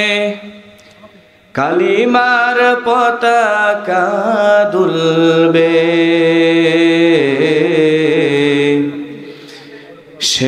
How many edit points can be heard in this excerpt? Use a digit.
0